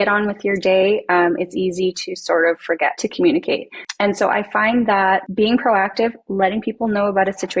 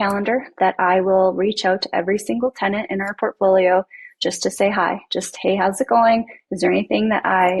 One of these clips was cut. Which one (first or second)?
first